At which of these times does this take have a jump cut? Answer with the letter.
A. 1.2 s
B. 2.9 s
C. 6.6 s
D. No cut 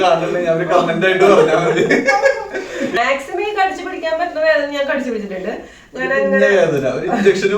B